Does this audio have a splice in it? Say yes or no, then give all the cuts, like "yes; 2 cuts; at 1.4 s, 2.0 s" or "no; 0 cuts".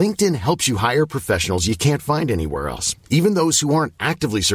no; 0 cuts